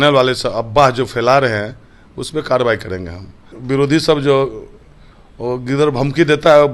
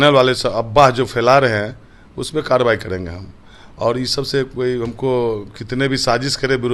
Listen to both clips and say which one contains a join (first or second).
first